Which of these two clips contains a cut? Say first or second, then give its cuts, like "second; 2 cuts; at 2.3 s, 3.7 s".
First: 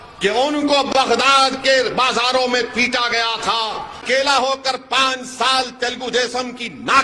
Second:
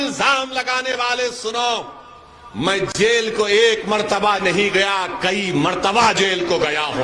first; 1 cut; at 4.0 s